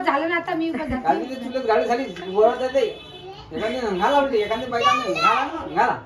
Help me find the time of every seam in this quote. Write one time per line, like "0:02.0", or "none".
none